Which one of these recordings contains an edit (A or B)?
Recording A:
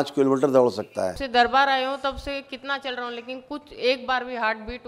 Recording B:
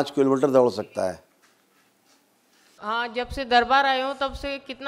A